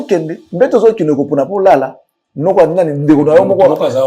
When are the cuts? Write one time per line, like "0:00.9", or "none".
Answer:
none